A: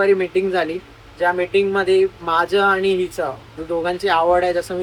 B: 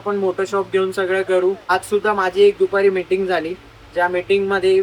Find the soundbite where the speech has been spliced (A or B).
B